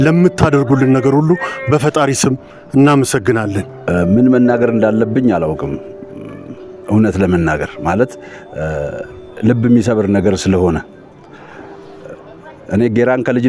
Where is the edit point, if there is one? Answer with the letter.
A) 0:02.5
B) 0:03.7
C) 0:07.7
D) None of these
B